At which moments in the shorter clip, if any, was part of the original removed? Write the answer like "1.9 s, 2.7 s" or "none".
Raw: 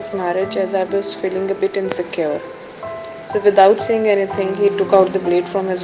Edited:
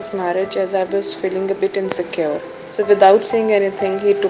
2.6 s